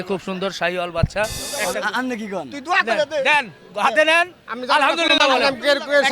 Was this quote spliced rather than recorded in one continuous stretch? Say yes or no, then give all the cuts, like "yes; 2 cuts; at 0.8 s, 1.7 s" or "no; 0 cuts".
yes; 1 cut; at 1.4 s